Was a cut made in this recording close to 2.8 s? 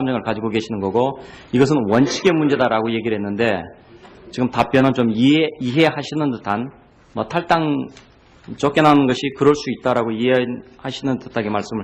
no; 1 cut; at 9.8 s

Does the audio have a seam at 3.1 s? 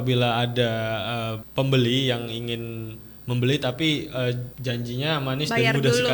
no; 2 cuts; at 1.4 s, 4.5 s

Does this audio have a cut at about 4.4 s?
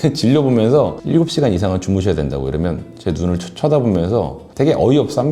yes; 1 cut; at 4.4 s

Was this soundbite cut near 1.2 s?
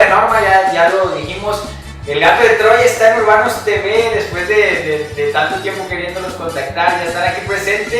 yes; 1 cut; at 1.2 s

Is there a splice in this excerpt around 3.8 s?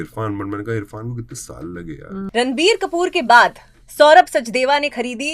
no; 1 cut; at 2.3 s

